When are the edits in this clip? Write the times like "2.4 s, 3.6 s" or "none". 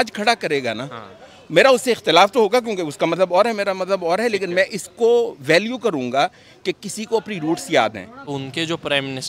8.3 s